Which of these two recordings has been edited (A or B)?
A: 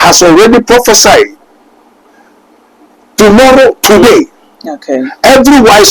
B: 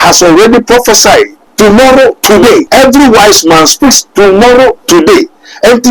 B